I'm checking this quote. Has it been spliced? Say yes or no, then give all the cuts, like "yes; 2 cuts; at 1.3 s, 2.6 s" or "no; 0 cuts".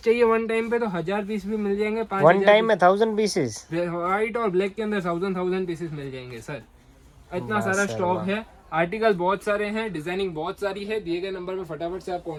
no; 0 cuts